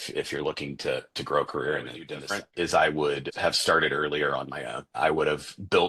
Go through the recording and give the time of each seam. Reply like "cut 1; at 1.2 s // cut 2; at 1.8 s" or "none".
cut 1; at 2.4 s // cut 2; at 3.3 s // cut 3; at 4.9 s